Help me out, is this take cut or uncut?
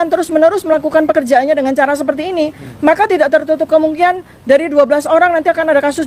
uncut